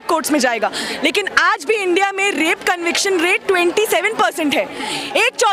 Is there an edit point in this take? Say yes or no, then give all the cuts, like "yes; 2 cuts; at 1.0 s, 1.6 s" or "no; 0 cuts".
no; 0 cuts